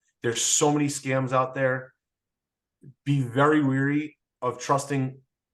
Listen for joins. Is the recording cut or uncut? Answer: uncut